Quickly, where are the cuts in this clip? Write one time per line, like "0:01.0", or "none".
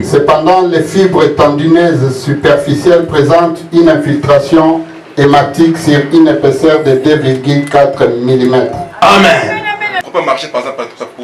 0:10.0